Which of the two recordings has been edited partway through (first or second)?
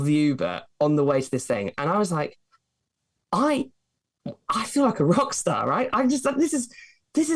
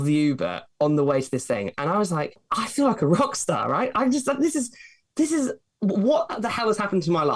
second